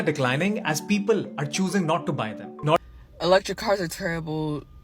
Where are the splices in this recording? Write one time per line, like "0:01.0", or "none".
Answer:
0:02.8